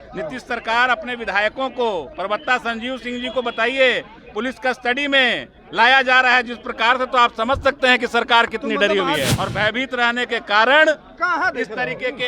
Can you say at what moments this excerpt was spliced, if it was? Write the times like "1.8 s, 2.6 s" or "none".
9.3 s

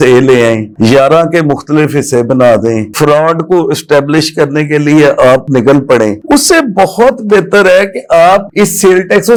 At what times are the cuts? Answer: none

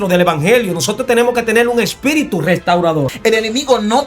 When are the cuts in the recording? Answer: 3.1 s

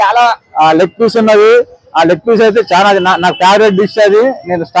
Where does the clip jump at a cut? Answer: none

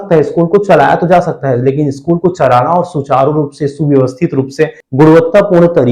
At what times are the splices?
4.8 s

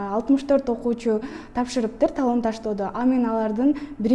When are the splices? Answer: none

